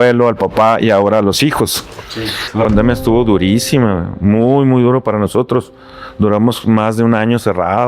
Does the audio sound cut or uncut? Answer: cut